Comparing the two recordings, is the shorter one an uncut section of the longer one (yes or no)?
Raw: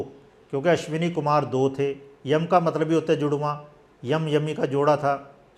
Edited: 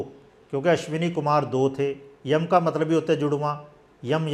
yes